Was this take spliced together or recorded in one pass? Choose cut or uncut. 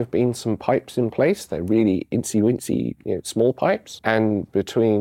uncut